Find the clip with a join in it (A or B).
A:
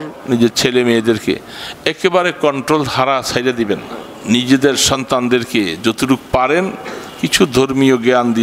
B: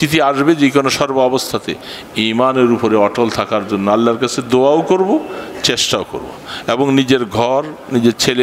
A